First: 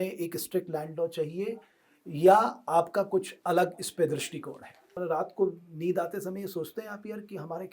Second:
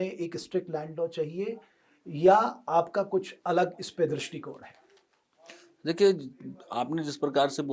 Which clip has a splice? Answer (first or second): first